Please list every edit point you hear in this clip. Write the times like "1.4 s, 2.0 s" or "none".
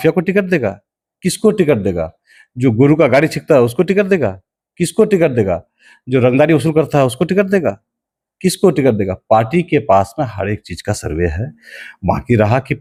none